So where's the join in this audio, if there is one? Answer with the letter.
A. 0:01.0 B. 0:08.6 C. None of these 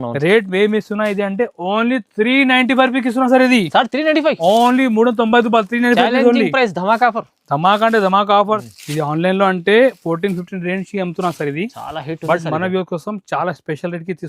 B